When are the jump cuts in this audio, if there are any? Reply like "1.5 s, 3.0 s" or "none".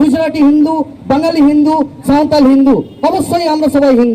none